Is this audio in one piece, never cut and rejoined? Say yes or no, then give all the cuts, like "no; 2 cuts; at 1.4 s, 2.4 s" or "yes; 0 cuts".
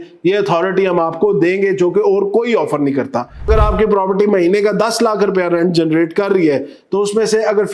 no; 1 cut; at 3.5 s